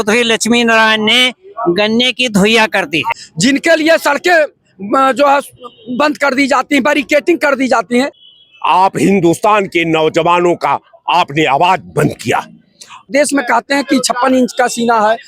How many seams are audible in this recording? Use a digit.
3